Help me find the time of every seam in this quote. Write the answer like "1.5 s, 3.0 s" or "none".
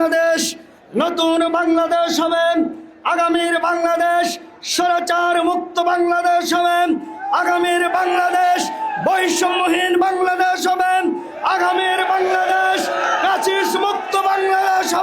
none